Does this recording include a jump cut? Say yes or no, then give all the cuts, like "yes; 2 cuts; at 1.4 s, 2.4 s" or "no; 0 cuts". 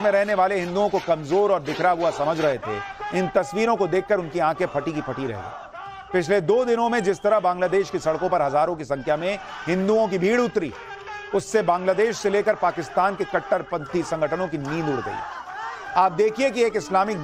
yes; 1 cut; at 13.4 s